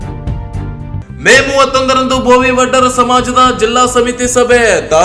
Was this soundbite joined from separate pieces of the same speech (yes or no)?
yes